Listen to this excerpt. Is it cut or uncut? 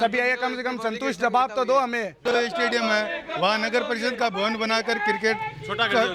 cut